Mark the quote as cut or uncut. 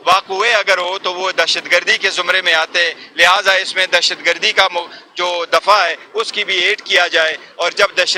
uncut